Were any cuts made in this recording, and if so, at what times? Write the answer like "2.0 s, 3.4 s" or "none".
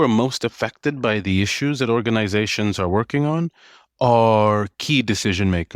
none